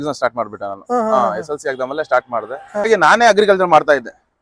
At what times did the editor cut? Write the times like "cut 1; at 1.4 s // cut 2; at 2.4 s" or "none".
cut 1; at 2.9 s